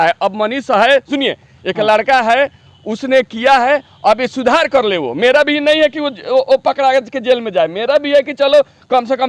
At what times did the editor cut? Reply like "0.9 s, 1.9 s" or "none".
none